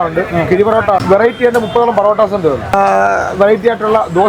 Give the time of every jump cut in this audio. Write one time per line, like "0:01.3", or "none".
0:01.0
0:02.7